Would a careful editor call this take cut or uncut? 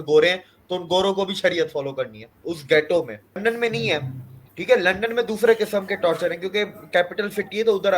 cut